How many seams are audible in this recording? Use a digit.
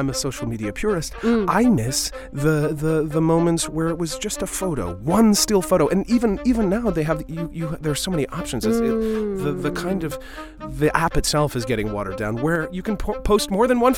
1